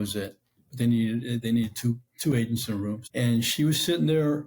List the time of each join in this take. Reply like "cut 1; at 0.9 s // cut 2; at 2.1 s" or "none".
cut 1; at 3.0 s